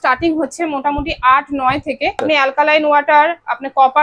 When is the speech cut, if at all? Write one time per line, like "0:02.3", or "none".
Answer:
0:02.2